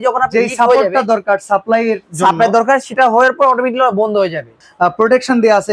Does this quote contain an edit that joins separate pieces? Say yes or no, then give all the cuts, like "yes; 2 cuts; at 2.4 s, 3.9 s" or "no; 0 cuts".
yes; 1 cut; at 4.6 s